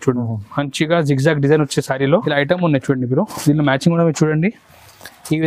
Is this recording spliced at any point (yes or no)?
yes